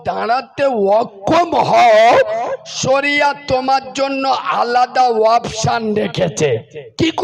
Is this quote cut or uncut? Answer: uncut